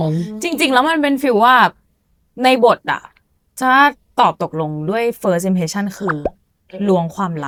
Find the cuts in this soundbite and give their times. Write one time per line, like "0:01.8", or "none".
none